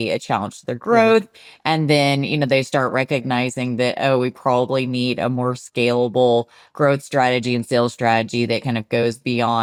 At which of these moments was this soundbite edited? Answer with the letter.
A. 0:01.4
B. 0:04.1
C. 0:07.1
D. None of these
D